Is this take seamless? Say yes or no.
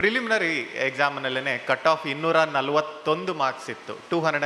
yes